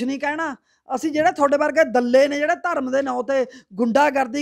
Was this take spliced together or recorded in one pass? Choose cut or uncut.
uncut